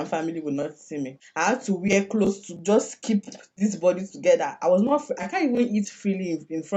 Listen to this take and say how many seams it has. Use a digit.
1